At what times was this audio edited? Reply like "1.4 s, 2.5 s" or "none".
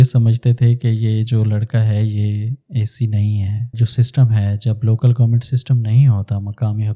3.8 s